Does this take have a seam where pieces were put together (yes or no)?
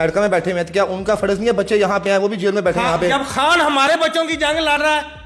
no